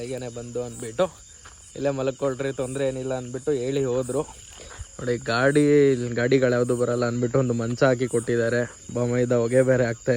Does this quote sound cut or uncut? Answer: uncut